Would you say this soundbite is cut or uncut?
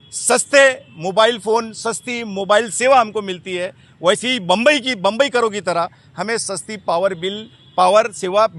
uncut